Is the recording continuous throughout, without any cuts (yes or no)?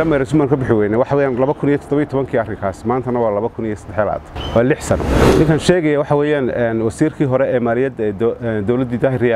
no